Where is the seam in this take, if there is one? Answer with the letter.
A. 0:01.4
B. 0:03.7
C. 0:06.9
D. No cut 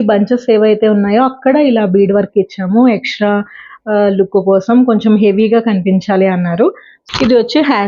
C